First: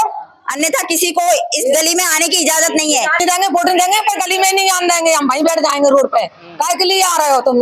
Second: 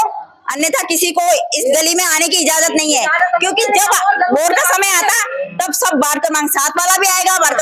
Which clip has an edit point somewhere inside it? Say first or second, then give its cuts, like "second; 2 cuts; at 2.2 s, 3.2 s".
first; 1 cut; at 3.2 s